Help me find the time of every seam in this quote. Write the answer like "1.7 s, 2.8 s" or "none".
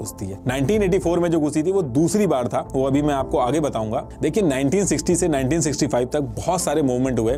none

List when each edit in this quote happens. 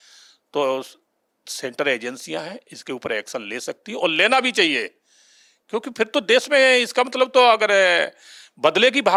none

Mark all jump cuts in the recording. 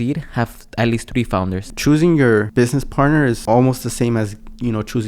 1.6 s, 2.5 s, 3.4 s

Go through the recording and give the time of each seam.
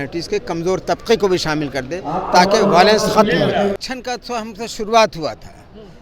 3.8 s

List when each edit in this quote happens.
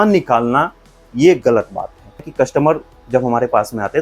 2.3 s

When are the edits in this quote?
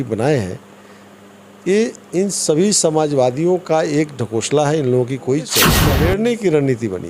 5.8 s

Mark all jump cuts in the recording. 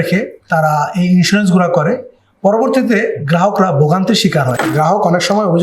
4.6 s

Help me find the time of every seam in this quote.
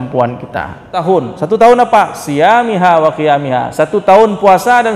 0.9 s

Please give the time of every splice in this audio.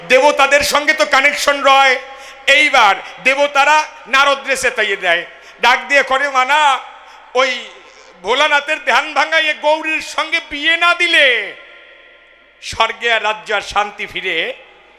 none

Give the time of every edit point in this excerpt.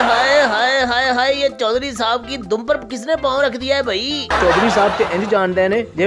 4.4 s

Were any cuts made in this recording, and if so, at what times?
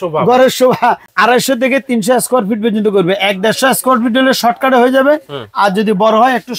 1.1 s

